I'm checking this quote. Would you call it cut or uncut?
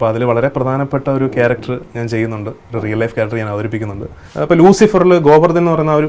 cut